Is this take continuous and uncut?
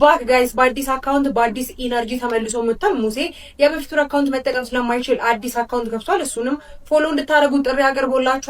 yes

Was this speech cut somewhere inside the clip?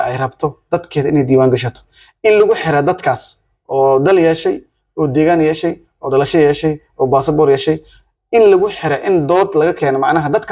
no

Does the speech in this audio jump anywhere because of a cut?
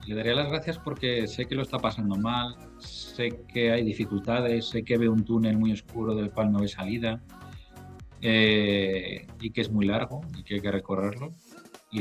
no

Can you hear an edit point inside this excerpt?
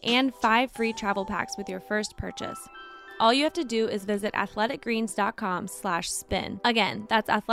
no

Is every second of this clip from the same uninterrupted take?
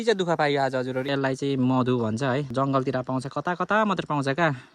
no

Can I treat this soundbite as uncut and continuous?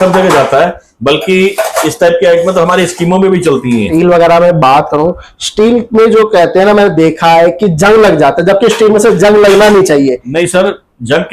no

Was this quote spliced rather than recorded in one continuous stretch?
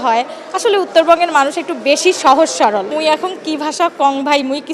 yes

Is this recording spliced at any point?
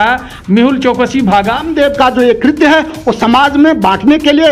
yes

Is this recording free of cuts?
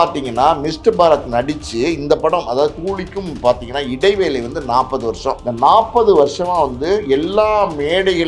no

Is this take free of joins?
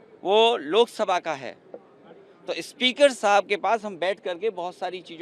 yes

